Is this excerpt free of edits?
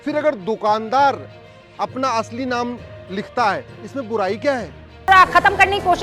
no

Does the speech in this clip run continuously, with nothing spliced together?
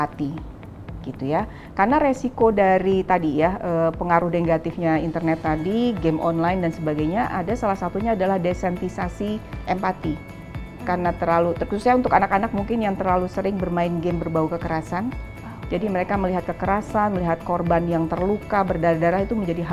yes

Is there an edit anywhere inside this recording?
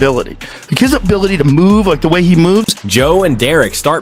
no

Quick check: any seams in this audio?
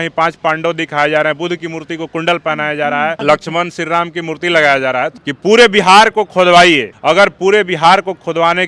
yes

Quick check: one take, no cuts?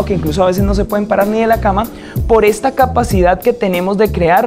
yes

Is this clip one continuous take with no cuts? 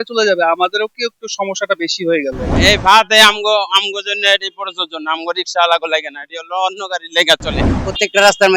no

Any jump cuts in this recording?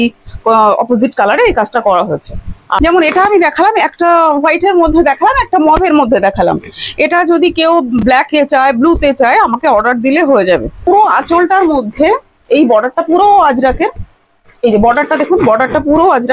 yes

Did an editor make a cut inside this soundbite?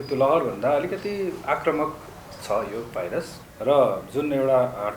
yes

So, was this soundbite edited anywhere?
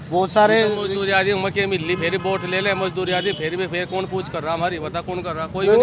no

